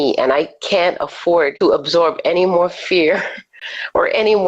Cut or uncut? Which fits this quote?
cut